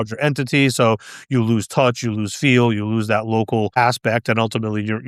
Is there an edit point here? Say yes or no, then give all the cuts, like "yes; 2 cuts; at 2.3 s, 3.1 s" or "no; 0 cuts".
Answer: no; 0 cuts